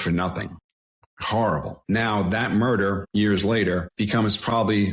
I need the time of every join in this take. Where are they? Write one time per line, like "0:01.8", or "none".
0:00.9
0:01.7
0:03.0
0:03.9